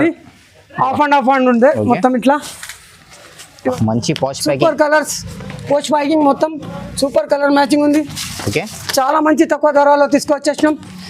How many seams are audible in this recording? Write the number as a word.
one